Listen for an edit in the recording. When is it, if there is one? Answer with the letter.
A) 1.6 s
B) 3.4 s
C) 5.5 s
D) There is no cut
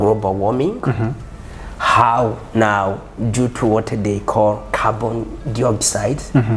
D